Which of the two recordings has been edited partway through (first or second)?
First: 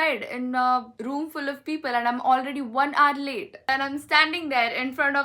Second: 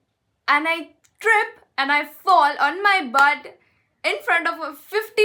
first